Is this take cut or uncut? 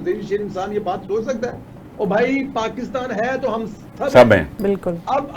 uncut